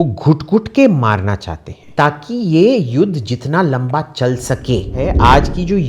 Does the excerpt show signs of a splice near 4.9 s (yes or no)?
yes